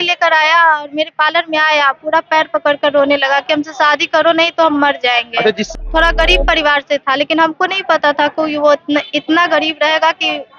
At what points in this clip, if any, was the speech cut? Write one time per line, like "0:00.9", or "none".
0:05.7